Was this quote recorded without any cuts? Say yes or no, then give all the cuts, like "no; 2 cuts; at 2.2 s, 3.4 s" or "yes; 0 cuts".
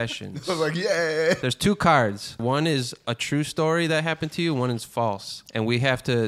no; 3 cuts; at 1.4 s, 2.4 s, 5.3 s